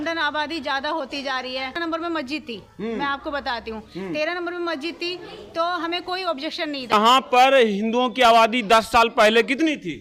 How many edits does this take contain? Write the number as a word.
two